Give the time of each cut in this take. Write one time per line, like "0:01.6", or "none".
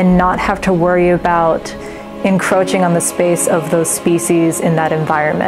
none